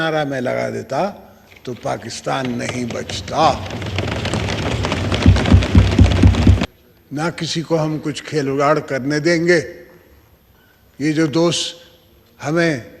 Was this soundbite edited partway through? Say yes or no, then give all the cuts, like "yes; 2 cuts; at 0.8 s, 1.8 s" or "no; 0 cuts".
yes; 1 cut; at 6.6 s